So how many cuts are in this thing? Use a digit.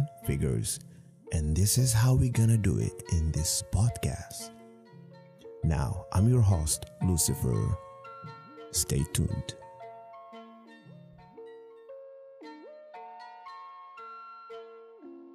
3